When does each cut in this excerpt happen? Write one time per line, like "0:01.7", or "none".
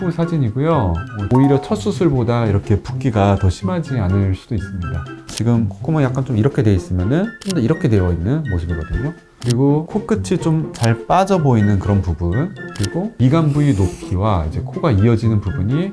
0:01.2
0:05.2